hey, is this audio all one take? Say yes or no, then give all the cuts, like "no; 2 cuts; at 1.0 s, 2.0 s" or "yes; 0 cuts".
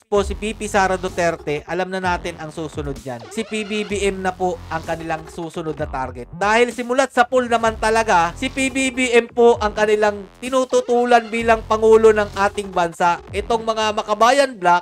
yes; 0 cuts